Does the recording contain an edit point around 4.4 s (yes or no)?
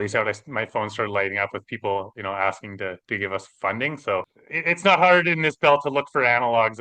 yes